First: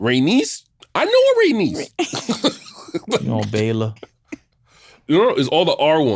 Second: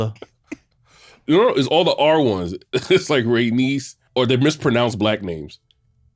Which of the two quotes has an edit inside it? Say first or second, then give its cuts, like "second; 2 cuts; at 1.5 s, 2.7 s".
second; 1 cut; at 3.9 s